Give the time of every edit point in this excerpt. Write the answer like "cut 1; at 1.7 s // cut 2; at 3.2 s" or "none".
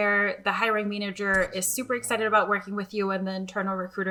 none